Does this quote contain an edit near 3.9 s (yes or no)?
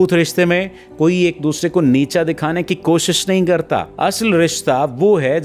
yes